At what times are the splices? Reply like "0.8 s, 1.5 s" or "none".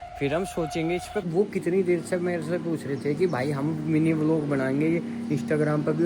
1.3 s